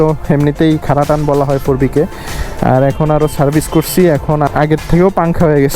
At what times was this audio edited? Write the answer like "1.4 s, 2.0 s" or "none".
4.5 s